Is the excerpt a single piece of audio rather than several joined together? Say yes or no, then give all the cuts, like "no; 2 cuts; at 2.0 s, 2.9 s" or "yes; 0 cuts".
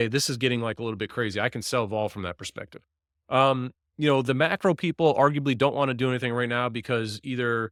yes; 0 cuts